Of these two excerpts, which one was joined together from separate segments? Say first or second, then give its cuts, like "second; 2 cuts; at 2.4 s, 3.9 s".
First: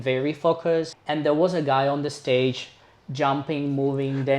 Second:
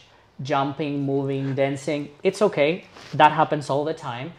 first; 1 cut; at 1.0 s